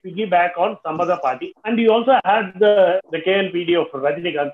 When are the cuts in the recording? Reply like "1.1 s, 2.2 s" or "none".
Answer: 1.5 s, 3.0 s